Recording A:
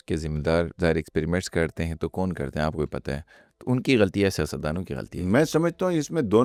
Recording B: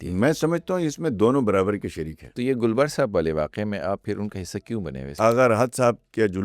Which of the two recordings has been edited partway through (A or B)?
B